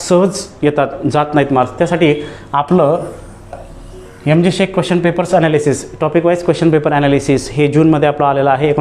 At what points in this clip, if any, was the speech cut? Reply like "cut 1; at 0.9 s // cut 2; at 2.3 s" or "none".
none